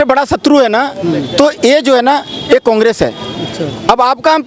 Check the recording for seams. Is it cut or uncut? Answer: uncut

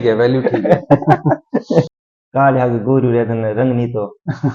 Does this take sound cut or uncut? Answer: cut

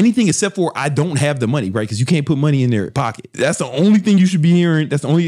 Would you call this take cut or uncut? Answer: cut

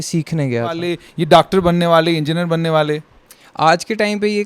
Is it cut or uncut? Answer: cut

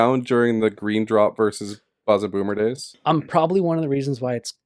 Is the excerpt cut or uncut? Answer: uncut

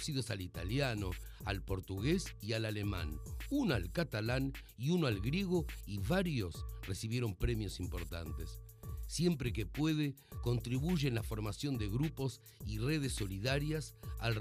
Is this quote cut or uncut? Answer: uncut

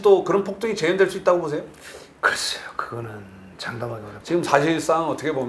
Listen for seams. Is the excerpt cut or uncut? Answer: cut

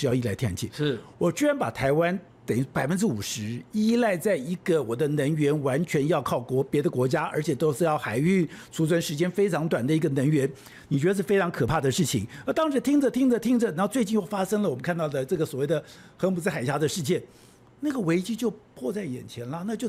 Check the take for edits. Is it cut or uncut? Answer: uncut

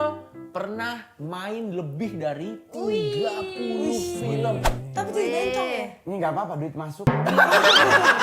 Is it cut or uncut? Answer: uncut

